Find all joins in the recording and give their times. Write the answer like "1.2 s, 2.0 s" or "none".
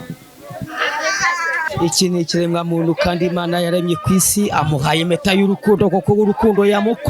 1.6 s